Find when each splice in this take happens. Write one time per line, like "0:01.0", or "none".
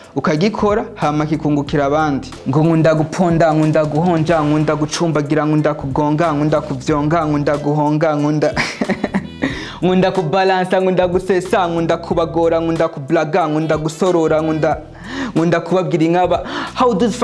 0:02.3